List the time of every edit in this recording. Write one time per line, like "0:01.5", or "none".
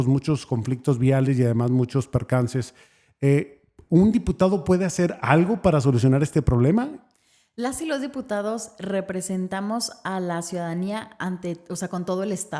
none

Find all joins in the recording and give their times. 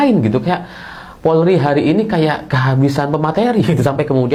none

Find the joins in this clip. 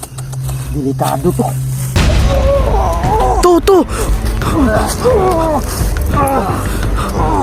0:02.0

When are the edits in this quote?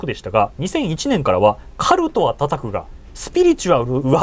none

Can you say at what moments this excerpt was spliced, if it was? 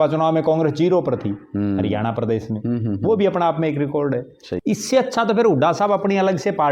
0:04.4

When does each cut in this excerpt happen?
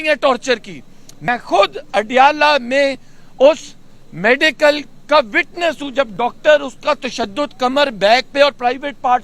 0:01.3

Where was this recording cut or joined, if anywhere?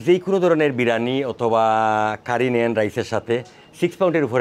none

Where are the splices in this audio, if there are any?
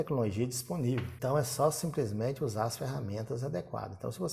0:01.1

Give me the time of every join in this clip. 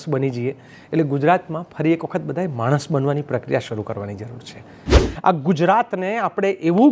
0:05.0

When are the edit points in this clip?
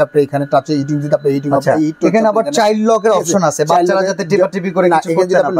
none

